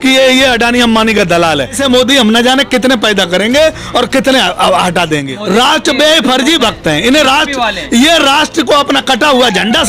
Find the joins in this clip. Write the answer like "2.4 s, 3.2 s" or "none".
1.8 s, 5.3 s